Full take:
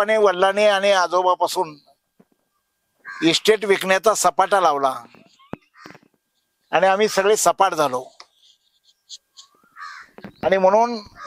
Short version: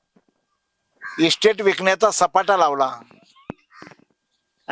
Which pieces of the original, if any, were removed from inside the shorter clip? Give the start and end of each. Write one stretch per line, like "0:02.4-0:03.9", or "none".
none